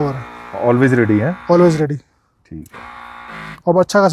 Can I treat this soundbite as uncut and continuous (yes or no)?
yes